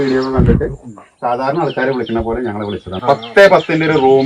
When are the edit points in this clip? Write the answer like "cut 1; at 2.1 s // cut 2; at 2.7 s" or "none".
cut 1; at 2.9 s